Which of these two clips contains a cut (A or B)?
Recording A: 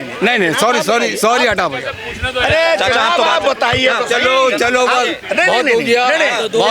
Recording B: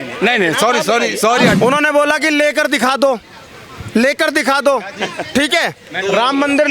B